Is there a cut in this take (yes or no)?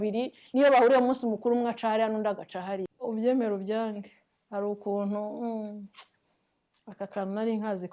yes